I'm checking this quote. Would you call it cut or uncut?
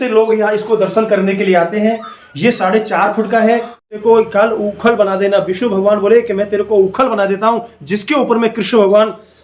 uncut